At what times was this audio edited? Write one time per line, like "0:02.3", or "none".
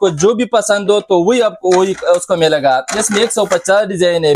none